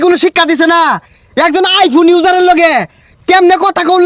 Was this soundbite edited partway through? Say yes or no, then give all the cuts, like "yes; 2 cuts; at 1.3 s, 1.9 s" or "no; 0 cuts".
no; 0 cuts